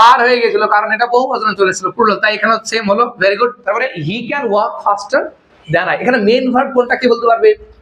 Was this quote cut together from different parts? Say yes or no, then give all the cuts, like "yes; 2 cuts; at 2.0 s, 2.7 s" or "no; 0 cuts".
yes; 1 cut; at 4.1 s